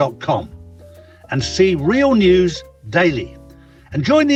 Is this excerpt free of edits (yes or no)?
yes